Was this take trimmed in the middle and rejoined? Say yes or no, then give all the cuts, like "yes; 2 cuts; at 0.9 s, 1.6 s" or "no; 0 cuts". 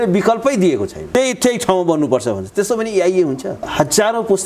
yes; 2 cuts; at 1.1 s, 3.6 s